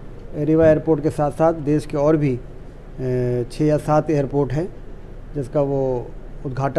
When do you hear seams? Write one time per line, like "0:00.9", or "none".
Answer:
none

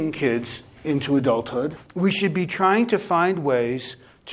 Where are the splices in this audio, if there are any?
0:01.8

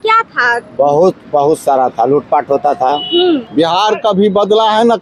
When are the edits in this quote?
0:03.5

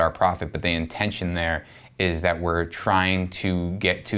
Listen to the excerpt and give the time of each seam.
none

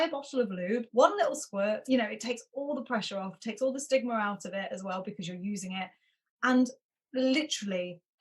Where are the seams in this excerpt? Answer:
0:00.9
0:01.8

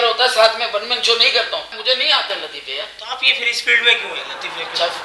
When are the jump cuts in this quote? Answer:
0:01.7

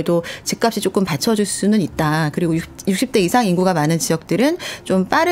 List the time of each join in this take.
none

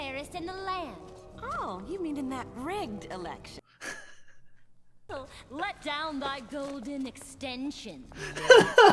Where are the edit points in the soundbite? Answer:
0:05.0

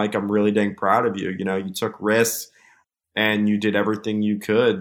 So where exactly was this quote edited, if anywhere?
0:02.7

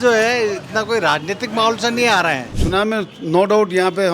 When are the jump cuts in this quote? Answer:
0:02.5

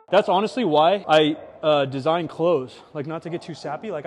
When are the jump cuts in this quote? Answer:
0:01.0

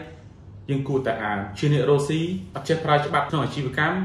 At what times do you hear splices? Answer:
0:02.5
0:03.3

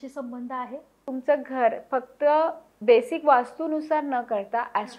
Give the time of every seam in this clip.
0:01.0

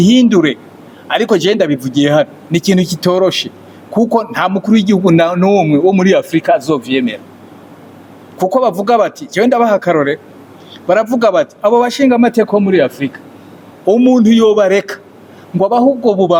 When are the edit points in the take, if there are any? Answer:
none

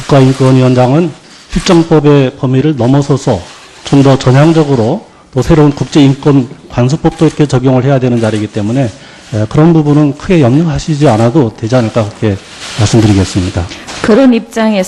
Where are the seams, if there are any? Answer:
0:13.8

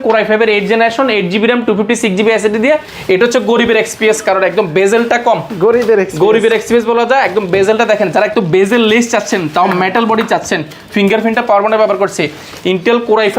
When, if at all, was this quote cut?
0:02.9

